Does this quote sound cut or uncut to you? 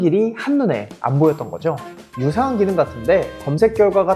cut